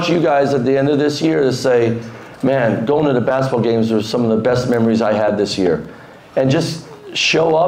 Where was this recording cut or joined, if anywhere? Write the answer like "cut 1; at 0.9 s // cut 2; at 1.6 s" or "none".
none